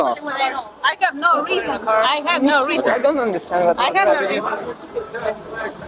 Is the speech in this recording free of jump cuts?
yes; 0 cuts

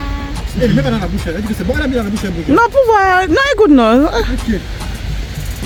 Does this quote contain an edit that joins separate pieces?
no; 0 cuts

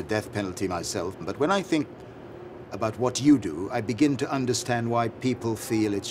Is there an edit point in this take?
yes; 1 cut; at 1.2 s

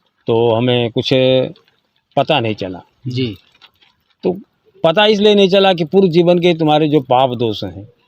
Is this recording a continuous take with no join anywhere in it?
yes; 0 cuts

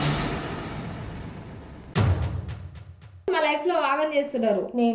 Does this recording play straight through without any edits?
no; 1 cut; at 3.3 s

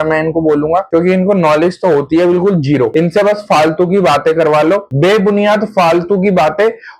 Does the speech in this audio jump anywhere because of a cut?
no; 0 cuts

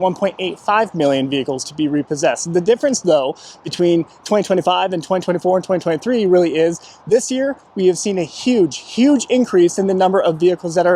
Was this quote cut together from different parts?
no; 0 cuts

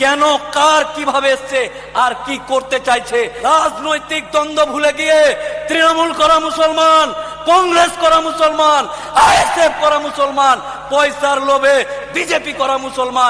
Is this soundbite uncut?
no; 1 cut; at 3.3 s

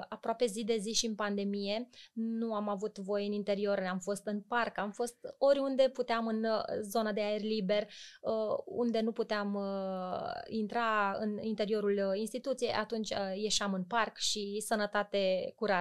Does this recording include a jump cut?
no; 0 cuts

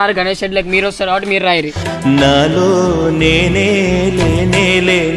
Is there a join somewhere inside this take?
yes; 1 cut; at 1.7 s

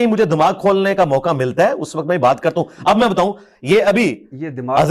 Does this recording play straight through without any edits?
yes; 0 cuts

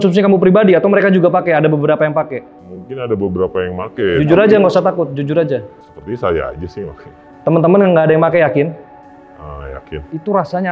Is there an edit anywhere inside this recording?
no; 0 cuts

